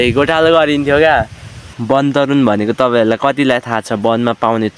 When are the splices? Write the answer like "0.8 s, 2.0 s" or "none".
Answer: 1.7 s